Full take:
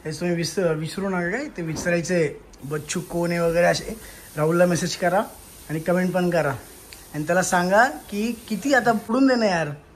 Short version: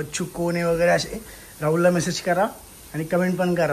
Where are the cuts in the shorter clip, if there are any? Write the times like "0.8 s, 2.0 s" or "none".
none